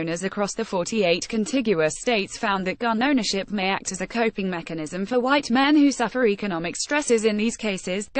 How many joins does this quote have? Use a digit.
0